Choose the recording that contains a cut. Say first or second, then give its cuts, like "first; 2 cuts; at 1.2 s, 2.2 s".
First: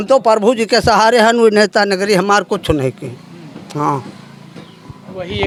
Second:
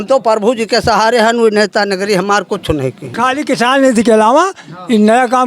second; 1 cut; at 3.1 s